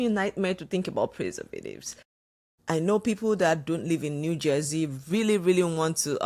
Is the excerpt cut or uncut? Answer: uncut